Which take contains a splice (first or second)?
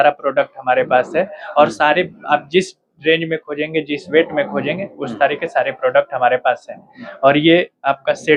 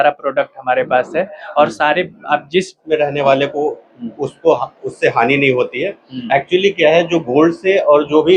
second